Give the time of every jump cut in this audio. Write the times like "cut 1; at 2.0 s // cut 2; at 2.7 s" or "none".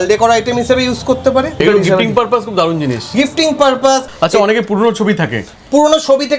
cut 1; at 1.6 s // cut 2; at 4.1 s